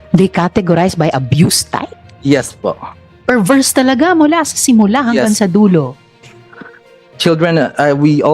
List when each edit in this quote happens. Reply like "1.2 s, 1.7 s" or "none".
7.0 s